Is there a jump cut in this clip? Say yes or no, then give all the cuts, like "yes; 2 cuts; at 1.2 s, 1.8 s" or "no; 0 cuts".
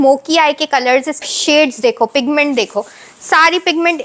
yes; 1 cut; at 1.2 s